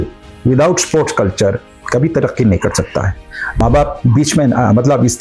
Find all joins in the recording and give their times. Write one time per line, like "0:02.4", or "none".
0:03.6

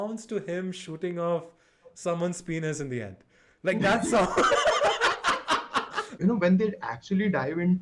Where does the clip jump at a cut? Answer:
0:06.0

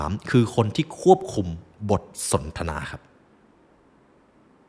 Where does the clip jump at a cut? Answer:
none

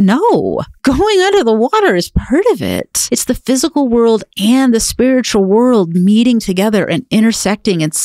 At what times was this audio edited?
0:02.9

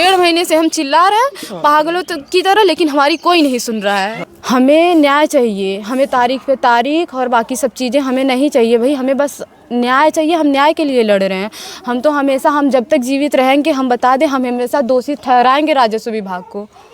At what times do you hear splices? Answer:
0:04.3

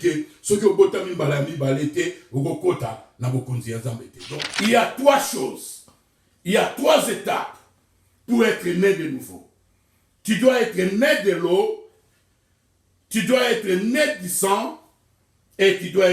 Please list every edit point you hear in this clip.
0:04.1

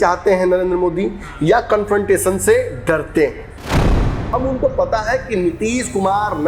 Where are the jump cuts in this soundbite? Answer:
0:03.9

